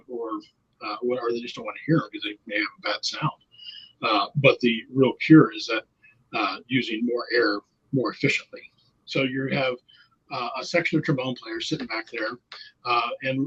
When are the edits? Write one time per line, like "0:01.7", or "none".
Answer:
0:09.0